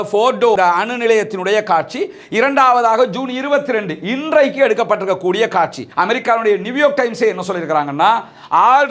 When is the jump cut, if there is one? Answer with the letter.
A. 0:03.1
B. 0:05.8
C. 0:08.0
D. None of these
B